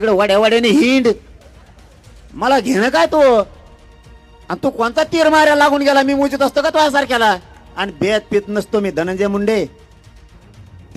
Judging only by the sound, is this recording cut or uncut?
cut